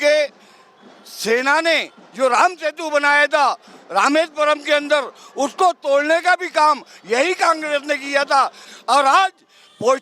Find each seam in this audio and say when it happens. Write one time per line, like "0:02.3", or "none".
0:08.7